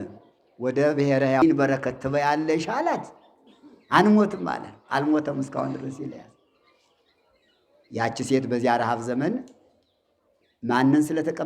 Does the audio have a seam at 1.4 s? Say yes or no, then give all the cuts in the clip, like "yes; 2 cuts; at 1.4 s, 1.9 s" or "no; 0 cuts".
yes; 1 cut; at 1.4 s